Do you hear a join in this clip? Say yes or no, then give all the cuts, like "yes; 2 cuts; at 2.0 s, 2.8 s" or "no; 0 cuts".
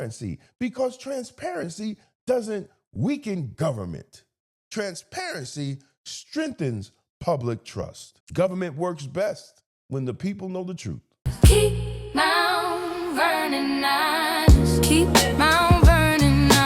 yes; 1 cut; at 11.3 s